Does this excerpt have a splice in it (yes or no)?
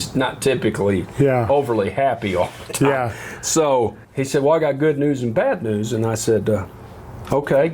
yes